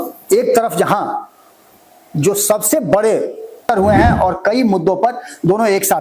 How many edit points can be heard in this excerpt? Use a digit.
1